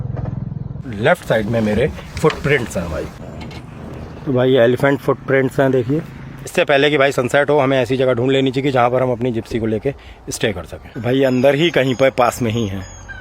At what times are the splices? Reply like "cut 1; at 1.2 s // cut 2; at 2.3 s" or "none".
cut 1; at 0.8 s // cut 2; at 6.5 s // cut 3; at 10.9 s